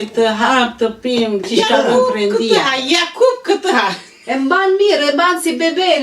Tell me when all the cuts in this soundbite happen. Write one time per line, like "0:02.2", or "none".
0:02.9

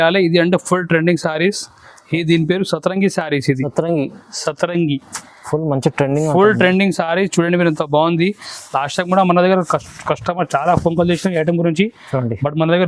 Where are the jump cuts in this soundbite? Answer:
none

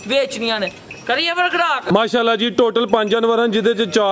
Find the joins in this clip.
0:01.9

